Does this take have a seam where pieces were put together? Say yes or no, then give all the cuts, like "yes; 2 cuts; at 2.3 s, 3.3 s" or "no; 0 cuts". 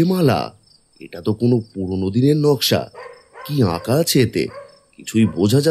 no; 0 cuts